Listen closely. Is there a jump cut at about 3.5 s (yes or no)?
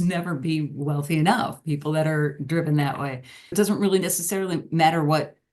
yes